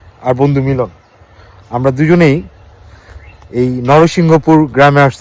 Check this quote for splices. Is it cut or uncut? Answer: uncut